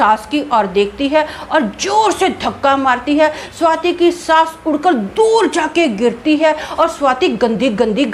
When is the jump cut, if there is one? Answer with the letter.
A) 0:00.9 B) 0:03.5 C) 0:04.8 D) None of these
D